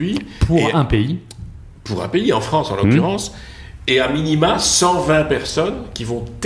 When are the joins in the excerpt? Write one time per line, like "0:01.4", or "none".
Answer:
none